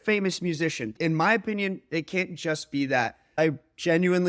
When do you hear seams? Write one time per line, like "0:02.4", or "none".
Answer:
0:00.9
0:03.4